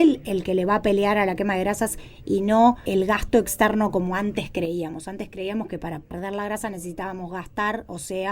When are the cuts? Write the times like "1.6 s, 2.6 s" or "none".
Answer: 2.8 s, 6.1 s